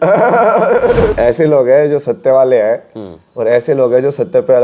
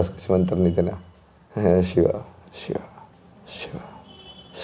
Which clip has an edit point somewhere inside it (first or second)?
first